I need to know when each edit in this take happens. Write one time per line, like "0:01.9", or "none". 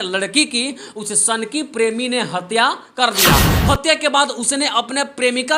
0:03.5